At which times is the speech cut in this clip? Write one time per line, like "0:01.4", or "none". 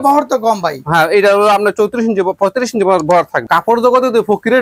0:03.4